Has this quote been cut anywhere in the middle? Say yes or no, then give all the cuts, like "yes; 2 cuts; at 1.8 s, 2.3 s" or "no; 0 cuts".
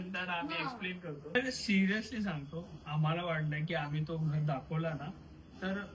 yes; 1 cut; at 1.3 s